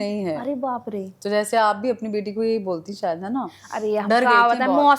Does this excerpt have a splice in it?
no; 0 cuts

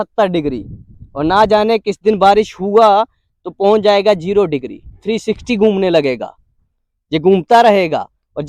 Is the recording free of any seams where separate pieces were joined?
yes; 0 cuts

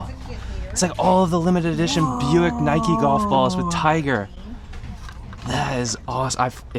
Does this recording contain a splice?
no; 0 cuts

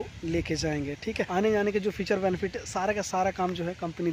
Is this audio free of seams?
yes; 0 cuts

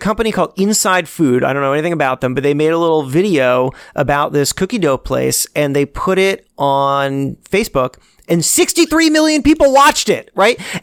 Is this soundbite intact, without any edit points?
yes; 0 cuts

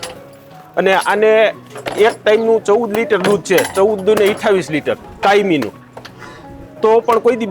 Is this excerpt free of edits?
yes; 0 cuts

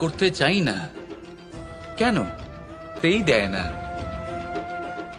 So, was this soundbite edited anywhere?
yes; 1 cut; at 2.9 s

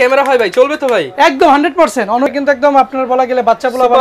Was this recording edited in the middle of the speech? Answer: yes; 1 cut; at 2.3 s

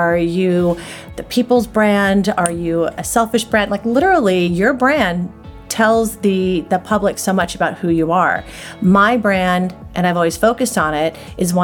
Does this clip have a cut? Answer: no; 0 cuts

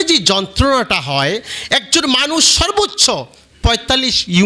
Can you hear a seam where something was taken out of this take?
no; 0 cuts

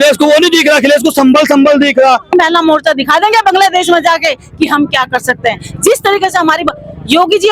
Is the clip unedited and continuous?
no; 1 cut; at 2.3 s

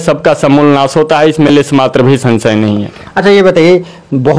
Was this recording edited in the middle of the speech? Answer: no; 0 cuts

